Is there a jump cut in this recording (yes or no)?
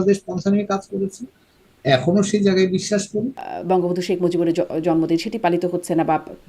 yes